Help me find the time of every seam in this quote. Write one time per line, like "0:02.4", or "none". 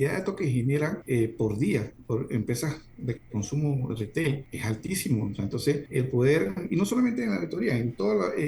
0:01.0
0:04.5
0:05.8